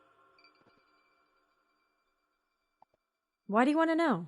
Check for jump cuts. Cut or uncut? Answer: cut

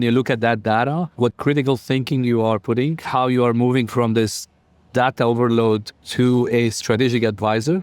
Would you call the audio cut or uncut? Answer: cut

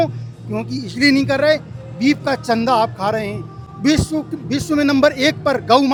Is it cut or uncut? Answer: uncut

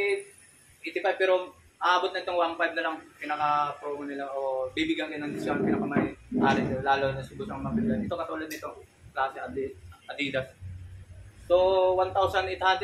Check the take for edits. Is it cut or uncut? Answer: uncut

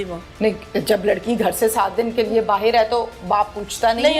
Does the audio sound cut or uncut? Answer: uncut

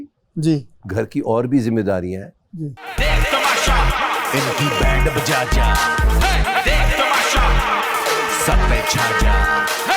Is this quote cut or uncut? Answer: cut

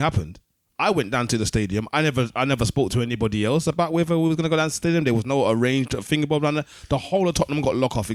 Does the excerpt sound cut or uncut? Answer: uncut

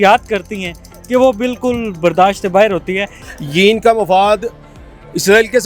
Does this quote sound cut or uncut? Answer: cut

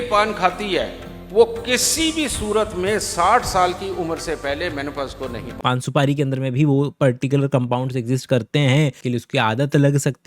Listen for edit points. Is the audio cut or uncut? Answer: cut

